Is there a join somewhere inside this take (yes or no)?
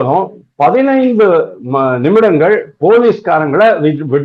no